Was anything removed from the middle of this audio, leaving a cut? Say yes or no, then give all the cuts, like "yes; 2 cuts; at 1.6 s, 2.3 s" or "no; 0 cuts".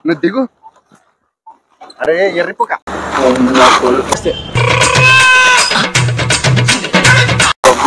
yes; 1 cut; at 2.9 s